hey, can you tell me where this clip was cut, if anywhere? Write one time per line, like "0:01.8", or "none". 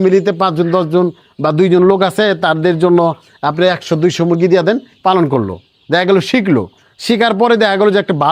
none